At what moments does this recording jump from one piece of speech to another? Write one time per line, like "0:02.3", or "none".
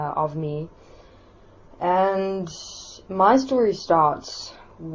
0:03.4